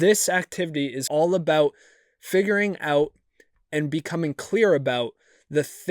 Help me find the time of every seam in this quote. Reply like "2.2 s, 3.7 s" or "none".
1.0 s